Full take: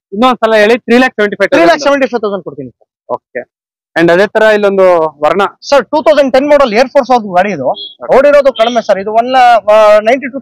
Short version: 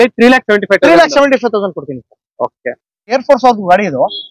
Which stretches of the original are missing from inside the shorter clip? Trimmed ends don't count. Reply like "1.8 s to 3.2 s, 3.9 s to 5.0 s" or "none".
3.8 s to 6.8 s